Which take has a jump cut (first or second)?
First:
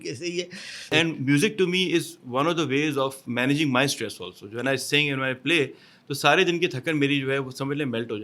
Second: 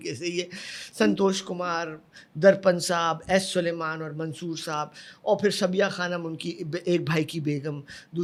first